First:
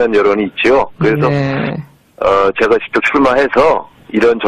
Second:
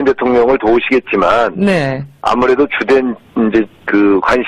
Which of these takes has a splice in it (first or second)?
first